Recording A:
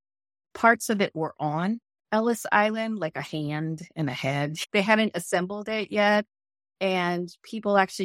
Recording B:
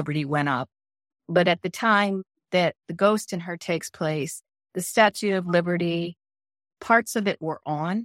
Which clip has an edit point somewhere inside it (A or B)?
A